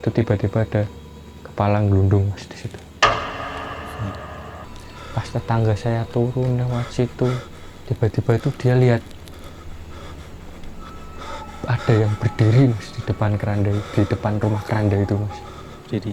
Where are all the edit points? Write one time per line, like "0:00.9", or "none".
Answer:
0:04.6